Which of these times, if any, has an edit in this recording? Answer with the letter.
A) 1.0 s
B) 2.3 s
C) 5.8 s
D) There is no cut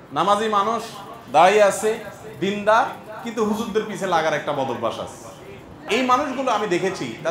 C